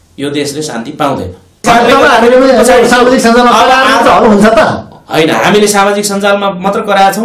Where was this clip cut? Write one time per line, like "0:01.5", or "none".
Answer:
0:01.6